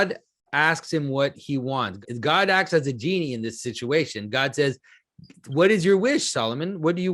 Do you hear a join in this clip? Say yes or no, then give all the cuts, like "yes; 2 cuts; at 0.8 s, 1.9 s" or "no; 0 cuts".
yes; 1 cut; at 2.0 s